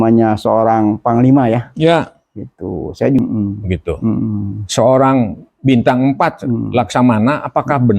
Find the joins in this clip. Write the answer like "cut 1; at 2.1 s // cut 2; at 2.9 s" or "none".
cut 1; at 3.2 s